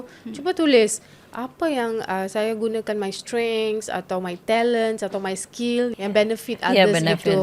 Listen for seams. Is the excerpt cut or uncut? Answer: cut